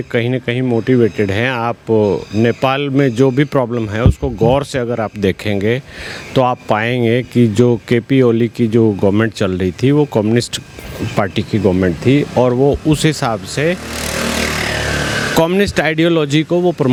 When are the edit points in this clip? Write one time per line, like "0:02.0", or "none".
none